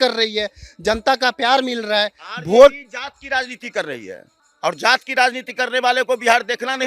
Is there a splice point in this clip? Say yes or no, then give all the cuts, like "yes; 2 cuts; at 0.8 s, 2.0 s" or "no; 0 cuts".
no; 0 cuts